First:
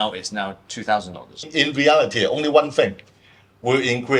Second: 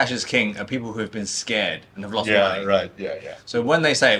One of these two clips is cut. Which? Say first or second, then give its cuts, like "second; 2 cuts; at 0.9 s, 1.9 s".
first; 1 cut; at 1.3 s